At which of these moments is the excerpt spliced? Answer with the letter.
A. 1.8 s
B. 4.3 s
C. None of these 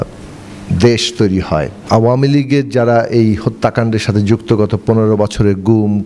A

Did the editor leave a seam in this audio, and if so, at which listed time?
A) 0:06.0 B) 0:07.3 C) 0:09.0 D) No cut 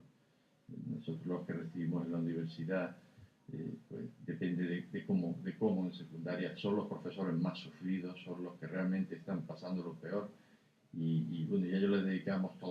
C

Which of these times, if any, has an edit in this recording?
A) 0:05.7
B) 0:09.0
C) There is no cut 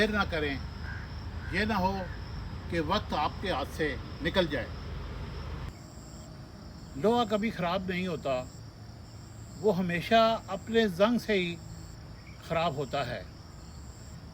A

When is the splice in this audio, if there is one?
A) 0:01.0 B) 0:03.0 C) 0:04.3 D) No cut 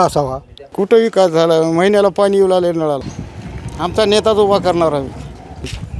B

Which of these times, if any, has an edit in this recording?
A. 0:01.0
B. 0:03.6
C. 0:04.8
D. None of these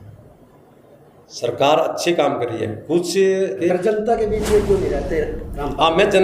B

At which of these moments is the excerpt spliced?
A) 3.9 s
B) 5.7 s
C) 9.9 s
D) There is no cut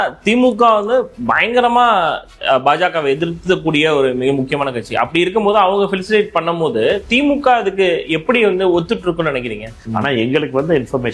C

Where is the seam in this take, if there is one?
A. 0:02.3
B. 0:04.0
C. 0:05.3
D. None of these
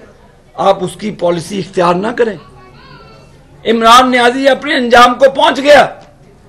D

